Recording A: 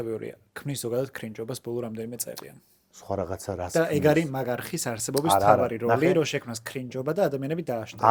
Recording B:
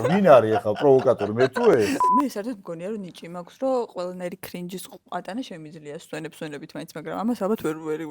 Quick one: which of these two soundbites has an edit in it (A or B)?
B